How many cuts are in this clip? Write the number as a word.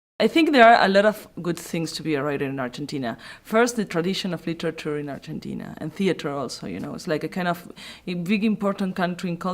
one